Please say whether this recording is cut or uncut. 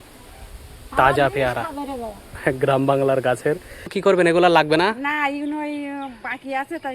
cut